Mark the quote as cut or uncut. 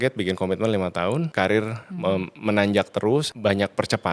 cut